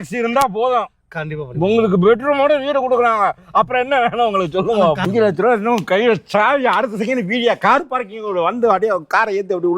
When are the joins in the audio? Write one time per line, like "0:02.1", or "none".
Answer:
0:05.0